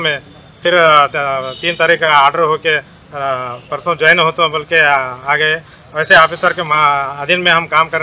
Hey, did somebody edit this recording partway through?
no; 0 cuts

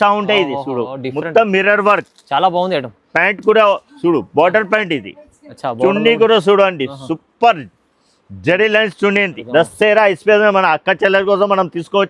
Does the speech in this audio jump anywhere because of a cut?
yes; 1 cut; at 9.4 s

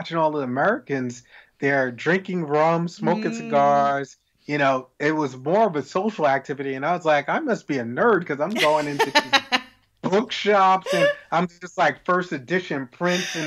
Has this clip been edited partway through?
no; 0 cuts

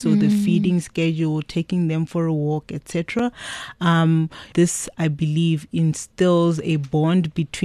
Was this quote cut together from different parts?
yes; 1 cut; at 4.5 s

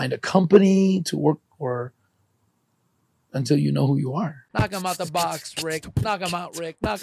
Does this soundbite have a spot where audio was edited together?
yes; 1 cut; at 4.4 s

